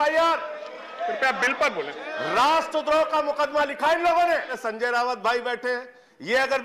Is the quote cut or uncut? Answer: cut